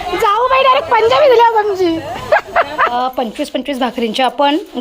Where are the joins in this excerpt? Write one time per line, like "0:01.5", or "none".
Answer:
0:02.9